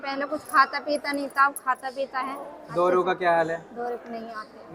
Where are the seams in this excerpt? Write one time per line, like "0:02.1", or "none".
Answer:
none